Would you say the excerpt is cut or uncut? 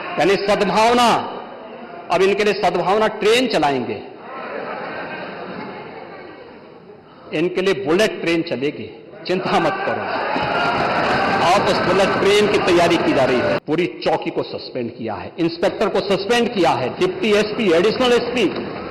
cut